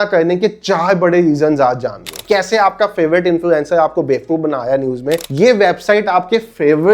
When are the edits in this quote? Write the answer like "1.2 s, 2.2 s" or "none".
2.2 s, 5.2 s